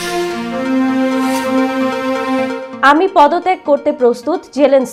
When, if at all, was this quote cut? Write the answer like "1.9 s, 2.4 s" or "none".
none